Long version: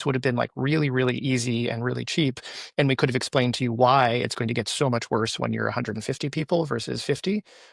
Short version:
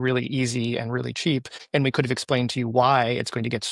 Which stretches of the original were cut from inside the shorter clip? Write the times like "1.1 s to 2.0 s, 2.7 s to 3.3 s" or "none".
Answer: 2.5 s to 2.6 s